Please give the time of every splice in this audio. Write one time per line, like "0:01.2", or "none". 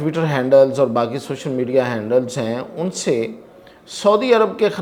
none